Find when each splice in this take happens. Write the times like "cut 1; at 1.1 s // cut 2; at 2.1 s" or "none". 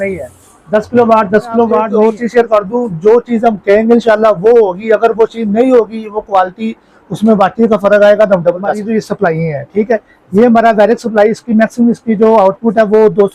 cut 1; at 1.8 s // cut 2; at 8.8 s

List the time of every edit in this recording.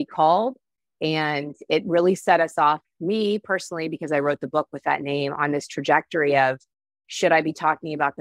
none

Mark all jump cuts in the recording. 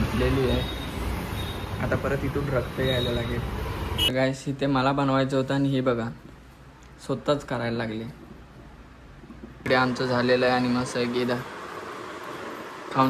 cut 1; at 4.0 s // cut 2; at 9.6 s

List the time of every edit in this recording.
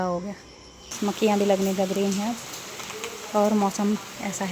cut 1; at 1.0 s

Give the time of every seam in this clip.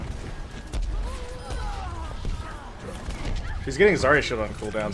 cut 1; at 1.3 s

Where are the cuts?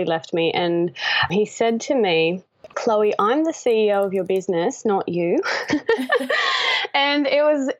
cut 1; at 1.3 s

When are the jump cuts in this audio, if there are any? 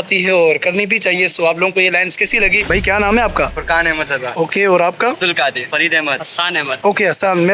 cut 1; at 2.6 s

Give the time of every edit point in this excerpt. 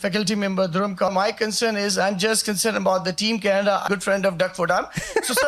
cut 1; at 1.1 s // cut 2; at 3.8 s

